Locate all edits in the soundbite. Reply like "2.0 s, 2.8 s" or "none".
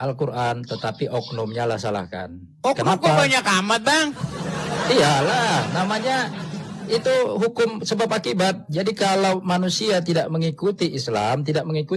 none